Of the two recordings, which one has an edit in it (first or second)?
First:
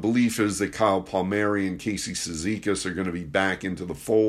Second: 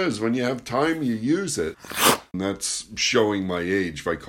second